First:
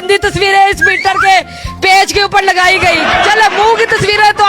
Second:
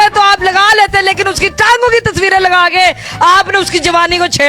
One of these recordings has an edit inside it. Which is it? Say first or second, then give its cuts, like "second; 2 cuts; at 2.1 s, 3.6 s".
first; 1 cut; at 3.2 s